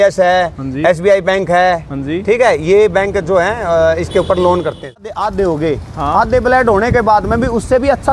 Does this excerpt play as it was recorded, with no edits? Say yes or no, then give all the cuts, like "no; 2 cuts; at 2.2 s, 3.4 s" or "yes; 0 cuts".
no; 1 cut; at 5.1 s